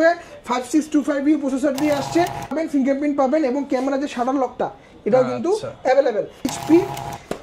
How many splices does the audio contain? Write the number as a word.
two